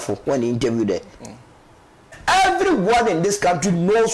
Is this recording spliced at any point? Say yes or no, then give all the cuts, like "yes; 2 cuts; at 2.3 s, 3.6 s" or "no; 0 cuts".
yes; 1 cut; at 2.1 s